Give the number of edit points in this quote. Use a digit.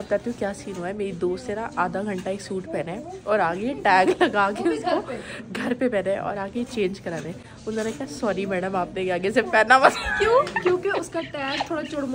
0